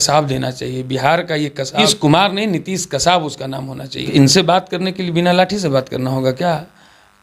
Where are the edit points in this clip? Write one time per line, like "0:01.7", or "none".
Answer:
0:01.8
0:04.1